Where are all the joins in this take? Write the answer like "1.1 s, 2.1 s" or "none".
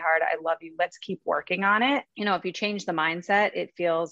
2.1 s